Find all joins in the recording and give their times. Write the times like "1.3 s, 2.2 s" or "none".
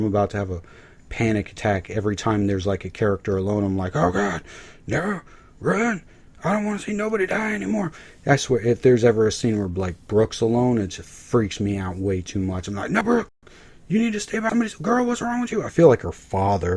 14.4 s